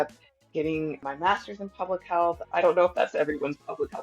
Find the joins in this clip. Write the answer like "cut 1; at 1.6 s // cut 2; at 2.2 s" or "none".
cut 1; at 1.0 s // cut 2; at 2.4 s